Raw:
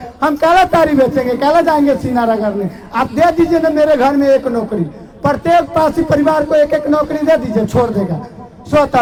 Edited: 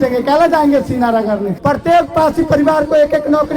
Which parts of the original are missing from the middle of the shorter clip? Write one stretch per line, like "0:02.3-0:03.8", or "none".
0:02.7-0:05.1